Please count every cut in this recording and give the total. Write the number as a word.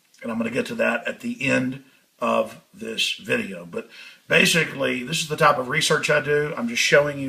one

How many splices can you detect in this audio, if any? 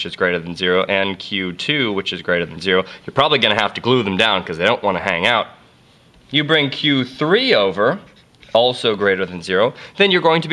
one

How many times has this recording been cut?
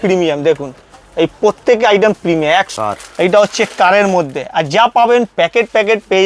one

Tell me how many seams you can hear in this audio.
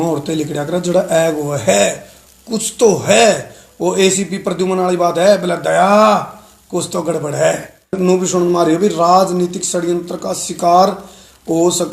one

